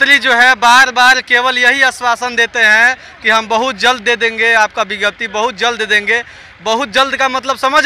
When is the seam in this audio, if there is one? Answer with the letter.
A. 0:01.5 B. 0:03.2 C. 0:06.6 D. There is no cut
D